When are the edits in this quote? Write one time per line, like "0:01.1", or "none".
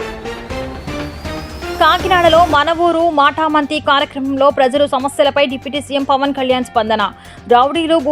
0:01.7